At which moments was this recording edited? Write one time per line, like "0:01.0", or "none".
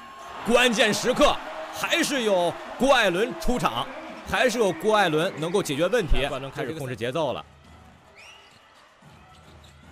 0:06.3